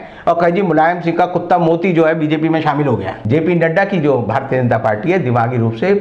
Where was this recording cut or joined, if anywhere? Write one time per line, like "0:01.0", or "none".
0:03.1